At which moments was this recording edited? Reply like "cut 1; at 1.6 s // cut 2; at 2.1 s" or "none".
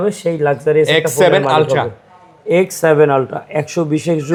none